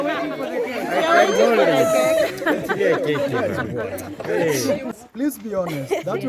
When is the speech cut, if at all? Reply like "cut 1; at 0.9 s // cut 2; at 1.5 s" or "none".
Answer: cut 1; at 4.9 s